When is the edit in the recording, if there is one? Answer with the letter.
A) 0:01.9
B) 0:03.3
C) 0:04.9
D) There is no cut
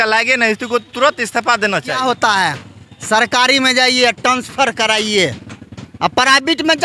A